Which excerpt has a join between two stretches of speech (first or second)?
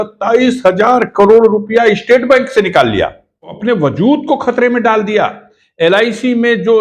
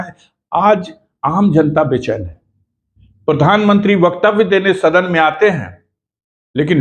first